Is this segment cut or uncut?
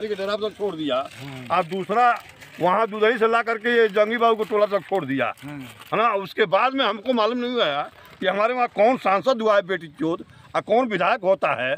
uncut